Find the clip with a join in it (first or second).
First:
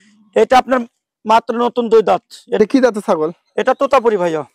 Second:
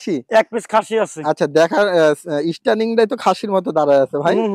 first